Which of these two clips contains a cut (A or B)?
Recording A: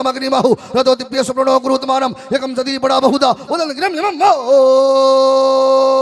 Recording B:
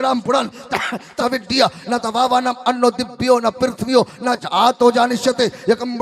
B